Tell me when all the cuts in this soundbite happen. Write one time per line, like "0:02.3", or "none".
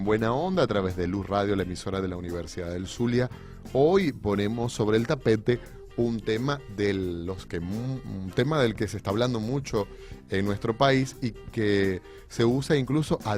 0:09.1